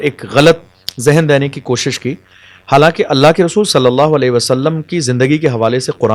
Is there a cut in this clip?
no; 0 cuts

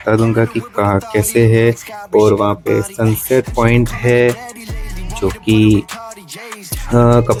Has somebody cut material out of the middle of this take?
no; 0 cuts

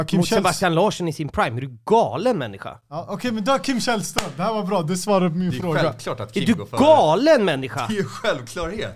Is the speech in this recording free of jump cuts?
yes; 0 cuts

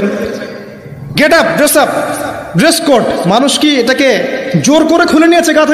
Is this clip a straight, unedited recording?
yes; 0 cuts

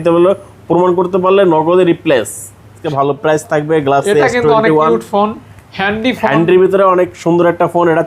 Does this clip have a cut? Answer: yes; 1 cut; at 2.8 s

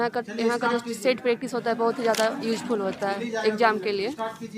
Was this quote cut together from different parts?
no; 0 cuts

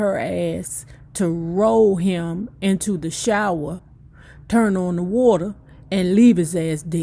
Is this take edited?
no; 0 cuts

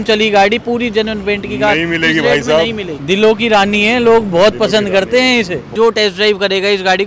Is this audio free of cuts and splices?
no; 2 cuts; at 2.9 s, 5.7 s

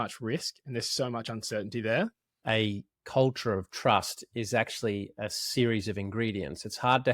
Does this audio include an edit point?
yes; 1 cut; at 2.4 s

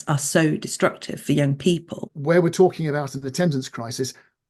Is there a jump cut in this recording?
yes; 1 cut; at 2.1 s

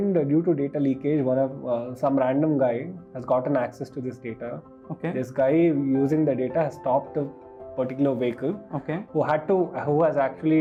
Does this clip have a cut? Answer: no; 0 cuts

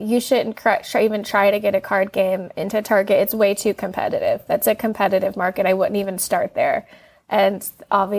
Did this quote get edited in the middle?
no; 0 cuts

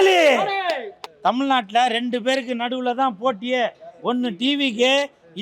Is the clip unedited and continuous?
no; 1 cut; at 1.0 s

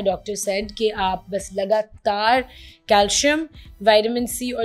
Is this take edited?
no; 0 cuts

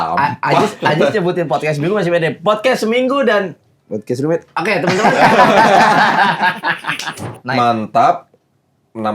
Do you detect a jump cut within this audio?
yes; 1 cut; at 7.4 s

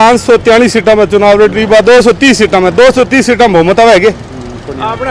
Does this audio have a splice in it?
no; 0 cuts

